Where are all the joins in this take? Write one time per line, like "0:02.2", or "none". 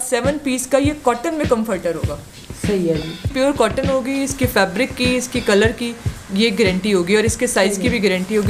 0:03.3